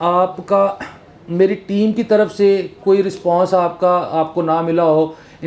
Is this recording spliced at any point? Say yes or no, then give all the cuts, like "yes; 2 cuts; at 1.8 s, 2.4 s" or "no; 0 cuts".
no; 0 cuts